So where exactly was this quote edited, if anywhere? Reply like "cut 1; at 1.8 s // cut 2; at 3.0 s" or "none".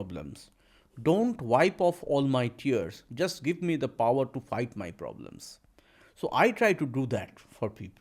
none